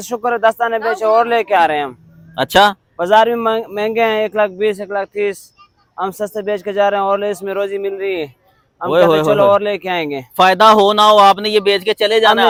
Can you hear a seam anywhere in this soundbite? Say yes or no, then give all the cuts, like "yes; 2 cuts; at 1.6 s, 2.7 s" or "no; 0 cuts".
no; 0 cuts